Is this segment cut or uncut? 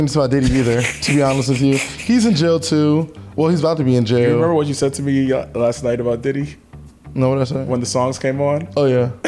uncut